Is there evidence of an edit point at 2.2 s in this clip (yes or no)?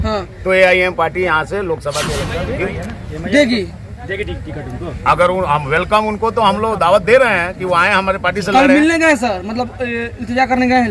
yes